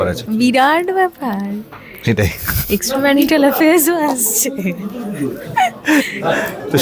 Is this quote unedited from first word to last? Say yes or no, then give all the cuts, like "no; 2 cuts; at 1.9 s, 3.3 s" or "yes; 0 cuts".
yes; 0 cuts